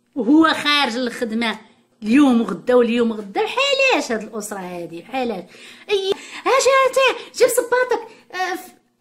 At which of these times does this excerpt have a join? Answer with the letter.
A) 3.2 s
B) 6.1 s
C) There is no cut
B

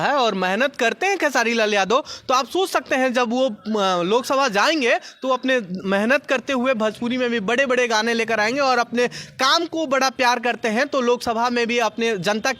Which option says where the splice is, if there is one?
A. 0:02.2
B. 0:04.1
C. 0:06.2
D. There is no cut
D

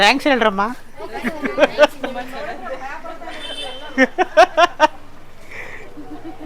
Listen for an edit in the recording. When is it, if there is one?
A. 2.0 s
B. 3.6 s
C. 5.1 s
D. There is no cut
D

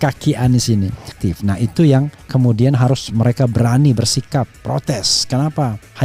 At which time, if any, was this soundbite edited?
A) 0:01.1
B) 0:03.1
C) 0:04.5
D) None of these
A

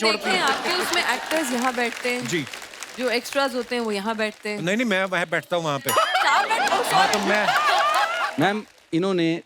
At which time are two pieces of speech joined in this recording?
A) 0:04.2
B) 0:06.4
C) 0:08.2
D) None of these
C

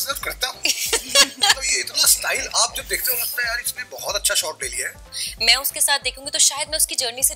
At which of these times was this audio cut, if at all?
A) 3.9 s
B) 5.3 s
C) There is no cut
B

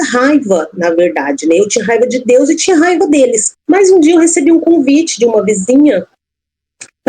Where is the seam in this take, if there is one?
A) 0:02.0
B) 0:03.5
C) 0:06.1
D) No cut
B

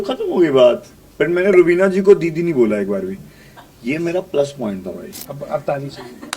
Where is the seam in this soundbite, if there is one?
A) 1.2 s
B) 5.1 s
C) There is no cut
B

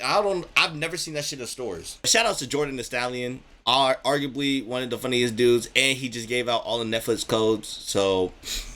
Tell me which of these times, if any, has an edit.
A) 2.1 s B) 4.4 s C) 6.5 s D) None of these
A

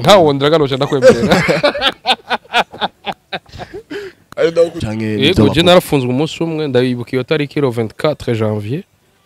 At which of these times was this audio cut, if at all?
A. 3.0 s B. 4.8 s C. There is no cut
B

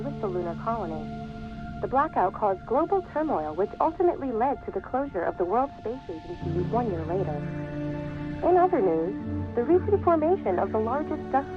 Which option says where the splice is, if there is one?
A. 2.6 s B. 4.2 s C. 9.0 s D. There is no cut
B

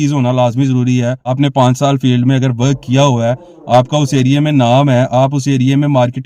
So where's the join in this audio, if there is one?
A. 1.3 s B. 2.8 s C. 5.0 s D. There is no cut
A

